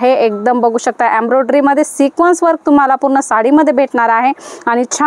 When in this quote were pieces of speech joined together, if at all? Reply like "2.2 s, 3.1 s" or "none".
none